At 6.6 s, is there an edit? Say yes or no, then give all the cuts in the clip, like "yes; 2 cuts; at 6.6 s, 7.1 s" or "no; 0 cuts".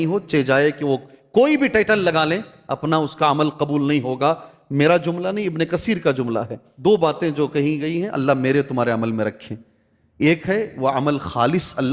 yes; 1 cut; at 6.6 s